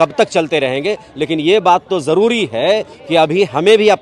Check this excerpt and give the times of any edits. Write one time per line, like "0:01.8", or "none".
none